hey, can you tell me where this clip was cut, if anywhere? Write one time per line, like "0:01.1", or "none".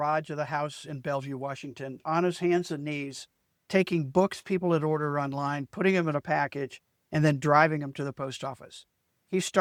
none